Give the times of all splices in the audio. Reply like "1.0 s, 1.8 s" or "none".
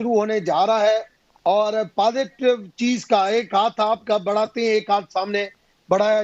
none